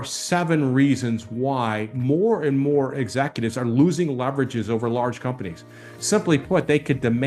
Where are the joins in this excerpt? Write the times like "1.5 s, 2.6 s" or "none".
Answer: none